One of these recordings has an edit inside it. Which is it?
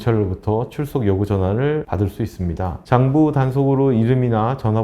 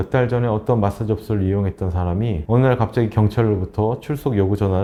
first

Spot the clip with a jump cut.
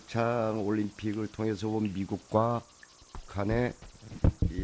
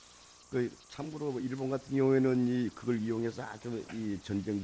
second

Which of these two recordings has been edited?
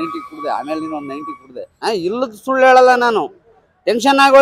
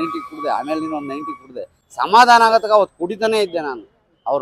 first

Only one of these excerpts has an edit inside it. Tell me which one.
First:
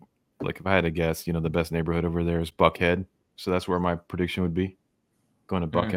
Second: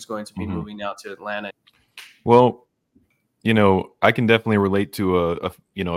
second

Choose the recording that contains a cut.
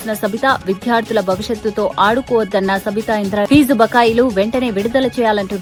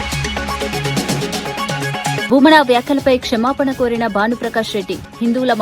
second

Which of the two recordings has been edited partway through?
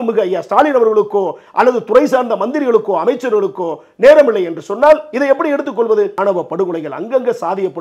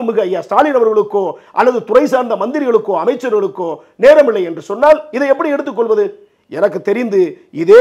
first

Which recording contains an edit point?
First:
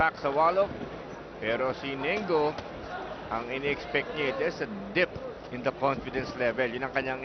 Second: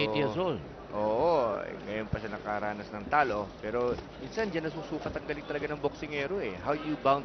first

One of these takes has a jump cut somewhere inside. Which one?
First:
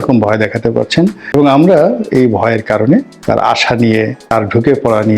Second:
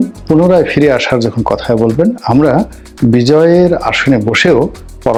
first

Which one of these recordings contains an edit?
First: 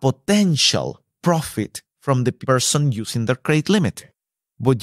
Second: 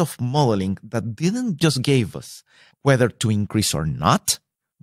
first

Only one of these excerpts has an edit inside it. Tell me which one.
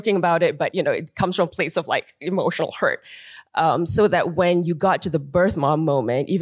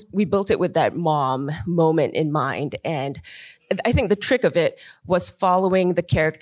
second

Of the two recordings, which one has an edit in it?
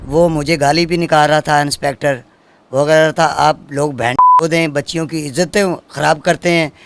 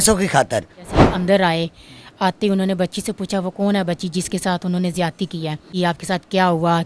second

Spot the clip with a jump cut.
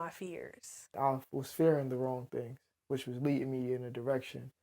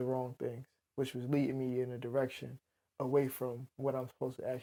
first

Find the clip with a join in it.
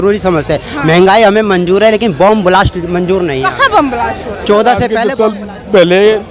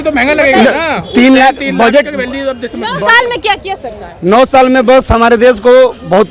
first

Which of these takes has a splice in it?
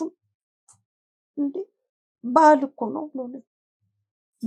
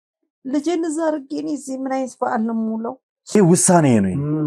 second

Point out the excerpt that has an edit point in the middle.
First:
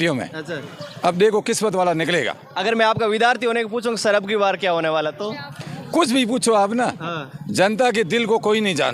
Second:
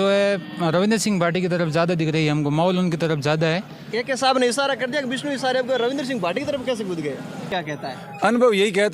second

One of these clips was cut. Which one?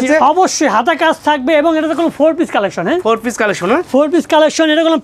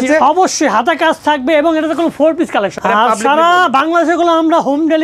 second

